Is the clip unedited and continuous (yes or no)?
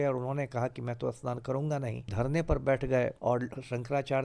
no